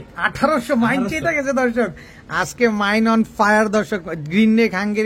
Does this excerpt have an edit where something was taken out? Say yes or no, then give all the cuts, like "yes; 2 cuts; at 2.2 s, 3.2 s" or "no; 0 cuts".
no; 0 cuts